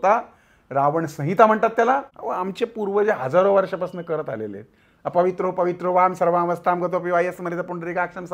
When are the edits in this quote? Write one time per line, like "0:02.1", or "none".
0:02.2

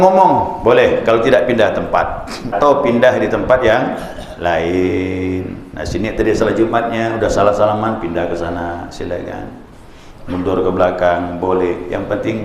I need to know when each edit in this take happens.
0:02.6

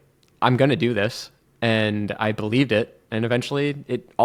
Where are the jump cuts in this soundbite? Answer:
none

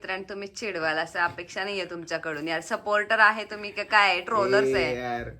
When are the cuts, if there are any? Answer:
none

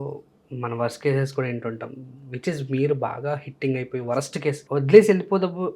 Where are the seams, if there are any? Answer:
0:04.6

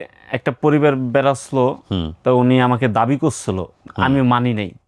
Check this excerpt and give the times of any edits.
none

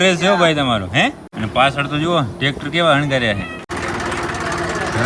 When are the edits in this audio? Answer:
0:01.3
0:03.7

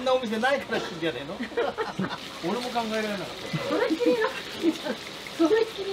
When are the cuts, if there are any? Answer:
none

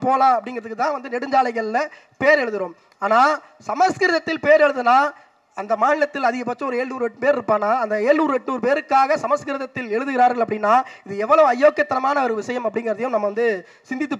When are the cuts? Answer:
none

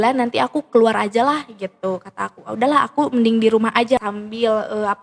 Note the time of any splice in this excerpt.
0:04.0

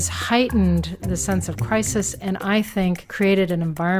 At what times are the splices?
0:03.1

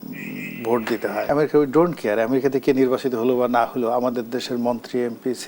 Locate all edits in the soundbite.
0:01.3

